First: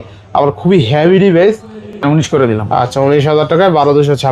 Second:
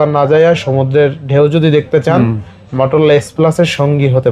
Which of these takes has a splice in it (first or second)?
first